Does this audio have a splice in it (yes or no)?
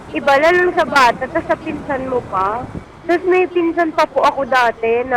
yes